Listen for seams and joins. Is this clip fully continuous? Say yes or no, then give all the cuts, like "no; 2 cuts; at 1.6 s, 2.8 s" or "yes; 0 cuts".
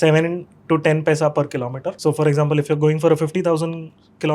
no; 1 cut; at 1.9 s